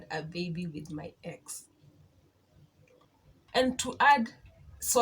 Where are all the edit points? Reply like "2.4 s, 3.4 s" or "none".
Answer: 3.4 s